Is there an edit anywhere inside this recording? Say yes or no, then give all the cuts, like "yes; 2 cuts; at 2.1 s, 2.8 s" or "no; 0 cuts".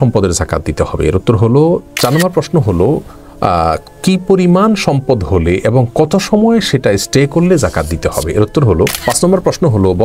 yes; 2 cuts; at 1.9 s, 9.0 s